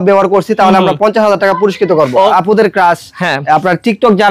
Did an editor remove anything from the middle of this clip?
yes; 1 cut; at 2.1 s

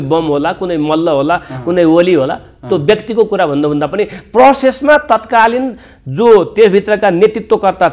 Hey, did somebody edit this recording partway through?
no; 0 cuts

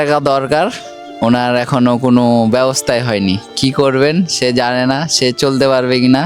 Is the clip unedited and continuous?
yes; 0 cuts

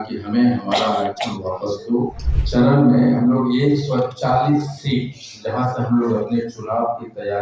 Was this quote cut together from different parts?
yes; 1 cut; at 2.3 s

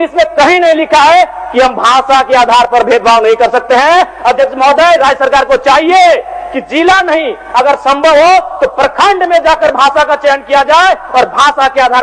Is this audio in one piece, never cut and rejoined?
yes; 0 cuts

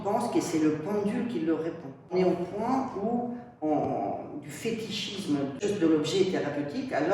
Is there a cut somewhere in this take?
yes; 2 cuts; at 2.1 s, 5.6 s

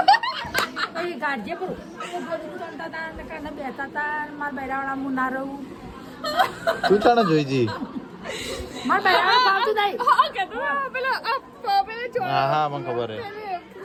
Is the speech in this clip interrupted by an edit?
no; 0 cuts

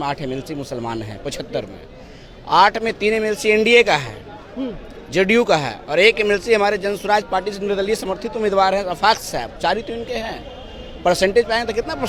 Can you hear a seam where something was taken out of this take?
no; 0 cuts

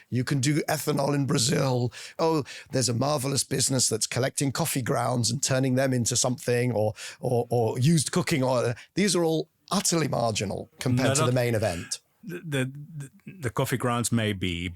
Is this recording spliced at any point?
yes; 1 cut; at 2.1 s

